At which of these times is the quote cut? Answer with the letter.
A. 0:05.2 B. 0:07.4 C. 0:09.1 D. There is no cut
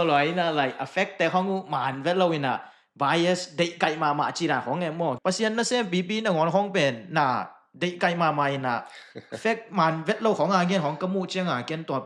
A